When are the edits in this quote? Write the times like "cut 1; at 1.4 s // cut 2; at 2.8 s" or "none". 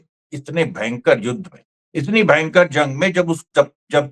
none